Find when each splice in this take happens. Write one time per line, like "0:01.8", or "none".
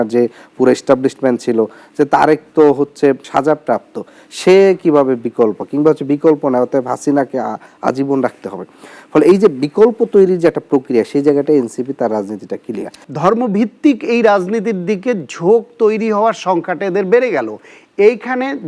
0:13.0